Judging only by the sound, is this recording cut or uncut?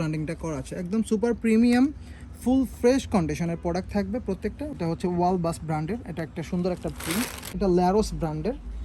cut